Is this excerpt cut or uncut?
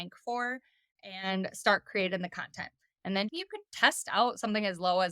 cut